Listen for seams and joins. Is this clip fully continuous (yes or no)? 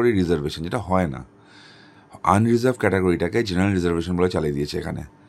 yes